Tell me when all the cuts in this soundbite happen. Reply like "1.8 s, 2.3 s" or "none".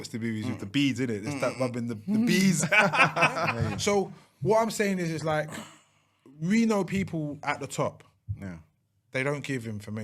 3.5 s